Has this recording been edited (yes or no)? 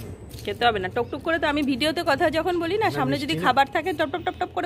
no